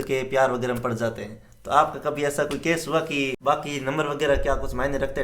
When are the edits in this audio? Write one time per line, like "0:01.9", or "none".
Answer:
0:03.4